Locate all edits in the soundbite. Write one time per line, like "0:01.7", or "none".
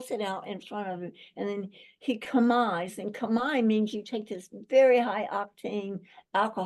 none